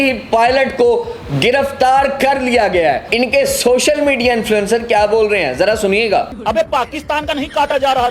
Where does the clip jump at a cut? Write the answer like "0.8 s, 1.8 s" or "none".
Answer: 3.1 s, 6.3 s